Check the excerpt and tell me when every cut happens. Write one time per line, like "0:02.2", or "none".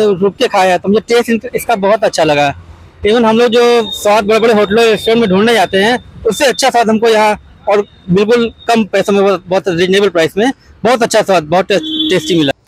none